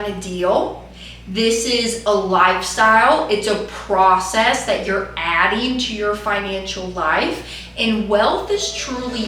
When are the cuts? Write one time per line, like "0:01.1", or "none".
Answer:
none